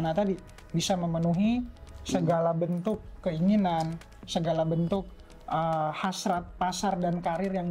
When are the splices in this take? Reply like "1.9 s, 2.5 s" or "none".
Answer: none